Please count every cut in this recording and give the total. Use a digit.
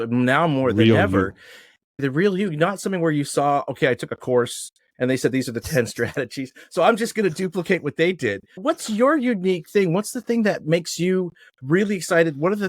1